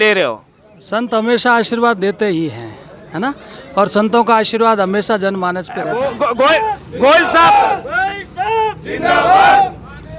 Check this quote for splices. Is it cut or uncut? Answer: cut